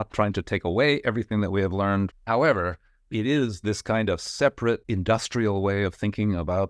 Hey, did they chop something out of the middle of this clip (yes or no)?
yes